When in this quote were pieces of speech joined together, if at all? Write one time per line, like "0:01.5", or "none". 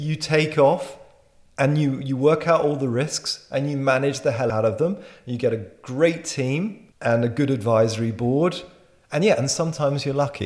0:04.5

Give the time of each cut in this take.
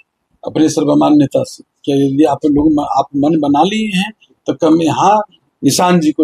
none

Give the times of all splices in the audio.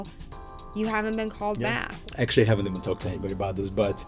0:01.9

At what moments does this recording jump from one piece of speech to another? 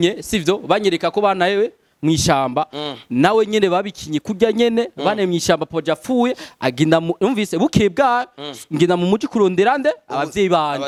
none

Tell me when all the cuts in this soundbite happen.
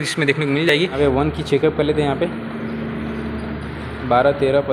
0:00.9

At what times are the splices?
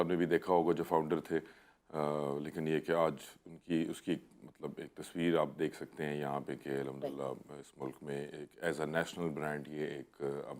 none

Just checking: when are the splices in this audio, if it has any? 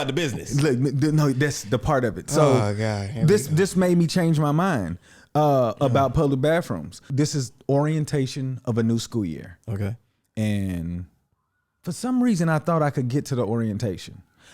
0:07.0

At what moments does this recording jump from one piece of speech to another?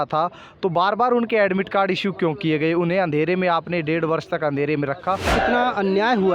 0:05.3

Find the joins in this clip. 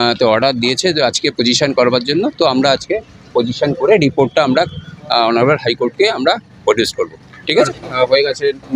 0:07.6

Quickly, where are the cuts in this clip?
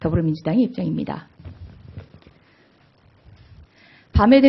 none

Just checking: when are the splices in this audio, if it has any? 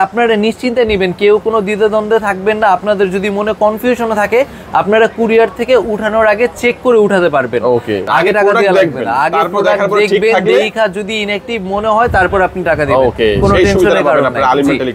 0:08.1

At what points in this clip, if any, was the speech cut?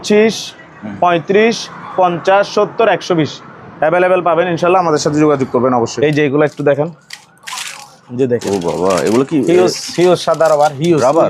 0:05.9

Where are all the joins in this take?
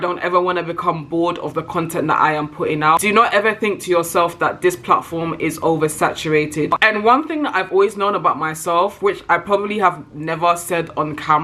0:03.0
0:06.8

